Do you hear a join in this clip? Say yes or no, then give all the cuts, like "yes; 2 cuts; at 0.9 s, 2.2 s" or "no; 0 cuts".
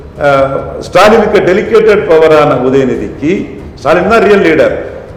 no; 0 cuts